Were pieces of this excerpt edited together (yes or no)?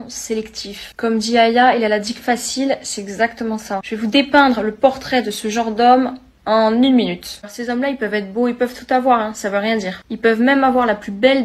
yes